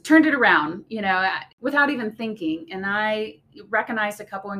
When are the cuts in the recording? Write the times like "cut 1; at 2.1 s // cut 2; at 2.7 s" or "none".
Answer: cut 1; at 1.5 s